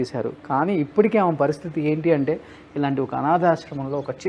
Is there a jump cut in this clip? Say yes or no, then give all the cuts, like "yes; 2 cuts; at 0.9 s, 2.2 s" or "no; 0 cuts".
no; 0 cuts